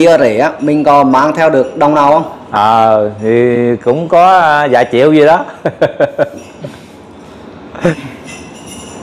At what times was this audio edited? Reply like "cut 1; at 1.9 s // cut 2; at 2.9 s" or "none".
cut 1; at 7.9 s